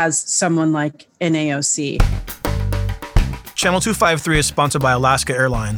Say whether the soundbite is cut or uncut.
cut